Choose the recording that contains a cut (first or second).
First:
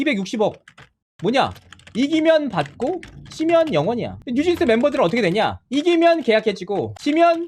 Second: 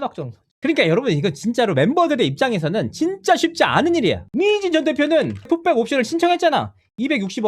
second